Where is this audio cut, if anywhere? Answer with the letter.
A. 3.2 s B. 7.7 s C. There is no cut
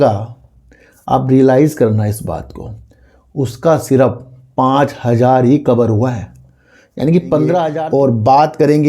B